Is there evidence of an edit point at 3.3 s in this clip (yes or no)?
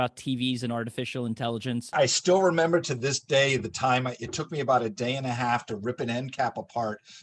no